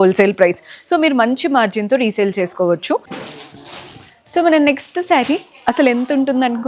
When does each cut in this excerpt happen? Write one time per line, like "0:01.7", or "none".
0:03.1